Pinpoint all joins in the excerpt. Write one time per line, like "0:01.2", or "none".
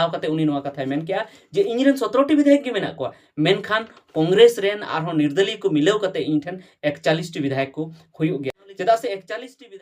0:08.6